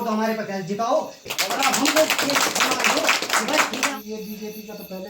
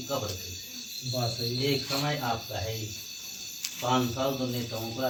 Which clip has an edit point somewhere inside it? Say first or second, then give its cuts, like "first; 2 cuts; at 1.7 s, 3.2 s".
first; 2 cuts; at 1.2 s, 3.9 s